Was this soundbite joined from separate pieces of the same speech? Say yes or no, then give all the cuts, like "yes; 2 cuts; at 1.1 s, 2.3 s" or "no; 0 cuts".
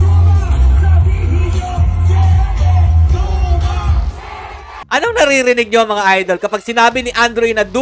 yes; 1 cut; at 4.8 s